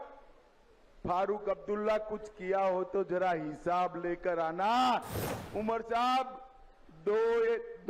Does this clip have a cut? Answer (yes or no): yes